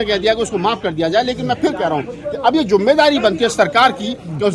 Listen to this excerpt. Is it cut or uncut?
uncut